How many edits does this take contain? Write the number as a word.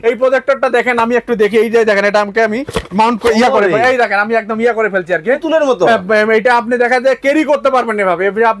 zero